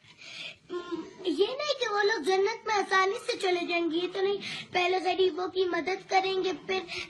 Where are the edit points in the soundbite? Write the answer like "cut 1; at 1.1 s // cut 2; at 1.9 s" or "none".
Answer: cut 1; at 3.5 s